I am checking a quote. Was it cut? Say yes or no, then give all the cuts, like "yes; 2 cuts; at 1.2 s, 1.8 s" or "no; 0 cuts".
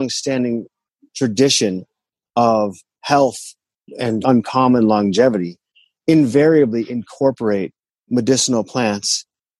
no; 0 cuts